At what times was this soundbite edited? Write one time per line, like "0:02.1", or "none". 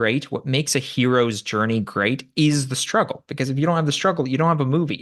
none